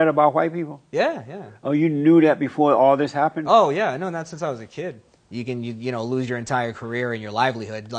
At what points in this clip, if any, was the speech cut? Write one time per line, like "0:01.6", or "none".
0:05.0